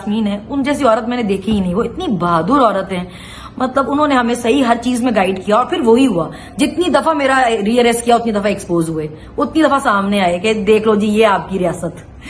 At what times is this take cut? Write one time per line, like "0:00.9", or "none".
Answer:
none